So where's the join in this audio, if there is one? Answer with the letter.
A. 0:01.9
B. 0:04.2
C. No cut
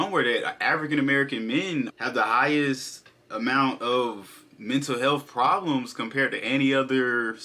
A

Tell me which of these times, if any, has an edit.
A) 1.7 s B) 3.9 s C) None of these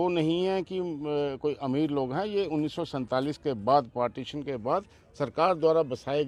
C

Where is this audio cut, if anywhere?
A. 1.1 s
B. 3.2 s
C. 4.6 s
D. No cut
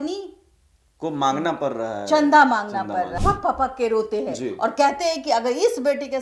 B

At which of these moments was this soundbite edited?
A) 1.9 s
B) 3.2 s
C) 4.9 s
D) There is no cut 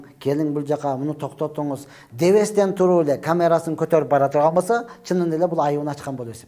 D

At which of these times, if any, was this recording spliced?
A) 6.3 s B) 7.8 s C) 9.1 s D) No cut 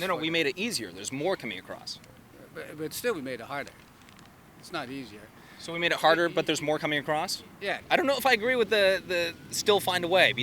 B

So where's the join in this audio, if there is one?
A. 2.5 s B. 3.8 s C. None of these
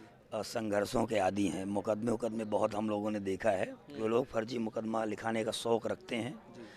B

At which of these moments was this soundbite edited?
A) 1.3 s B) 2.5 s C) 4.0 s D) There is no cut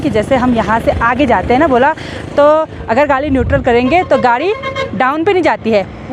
D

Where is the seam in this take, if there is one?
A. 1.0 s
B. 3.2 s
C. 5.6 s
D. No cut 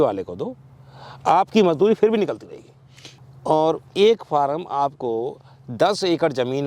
B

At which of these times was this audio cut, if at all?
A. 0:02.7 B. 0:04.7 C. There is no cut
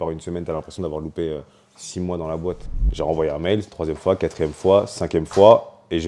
A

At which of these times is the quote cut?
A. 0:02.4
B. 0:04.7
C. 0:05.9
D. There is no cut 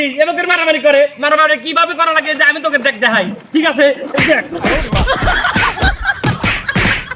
D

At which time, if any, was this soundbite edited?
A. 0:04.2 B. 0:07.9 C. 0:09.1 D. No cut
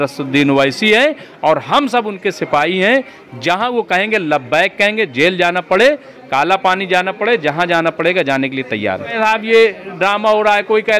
C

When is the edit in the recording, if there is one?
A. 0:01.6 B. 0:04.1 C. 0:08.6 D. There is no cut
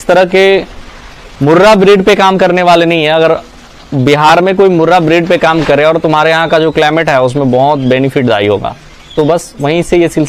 D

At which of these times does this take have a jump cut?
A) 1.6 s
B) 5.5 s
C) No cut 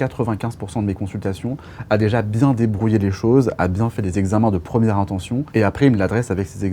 B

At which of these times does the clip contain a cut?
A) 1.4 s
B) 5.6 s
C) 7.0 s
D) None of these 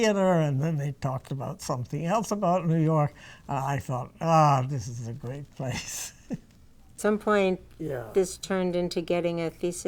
C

